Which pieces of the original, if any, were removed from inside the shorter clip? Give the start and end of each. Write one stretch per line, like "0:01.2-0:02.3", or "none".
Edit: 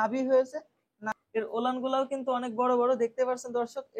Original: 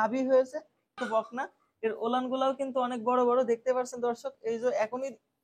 0:01.0-0:01.5